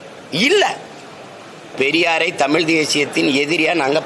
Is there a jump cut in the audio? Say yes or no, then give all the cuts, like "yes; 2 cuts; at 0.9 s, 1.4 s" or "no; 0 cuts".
yes; 1 cut; at 1.7 s